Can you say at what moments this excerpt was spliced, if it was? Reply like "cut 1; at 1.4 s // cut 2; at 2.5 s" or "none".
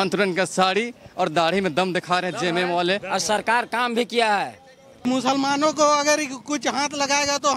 cut 1; at 5.1 s